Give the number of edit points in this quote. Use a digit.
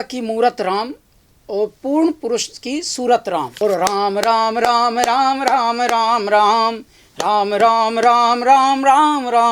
1